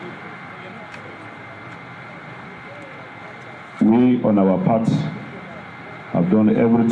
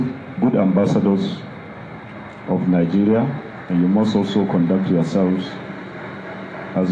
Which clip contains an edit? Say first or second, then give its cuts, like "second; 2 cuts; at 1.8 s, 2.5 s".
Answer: first; 1 cut; at 1.3 s